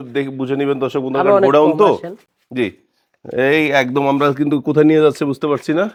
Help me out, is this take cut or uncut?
uncut